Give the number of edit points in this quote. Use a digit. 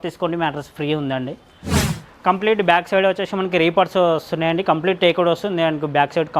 0